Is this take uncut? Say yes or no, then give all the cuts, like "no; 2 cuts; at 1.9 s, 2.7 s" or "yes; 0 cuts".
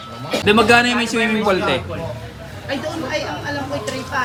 yes; 0 cuts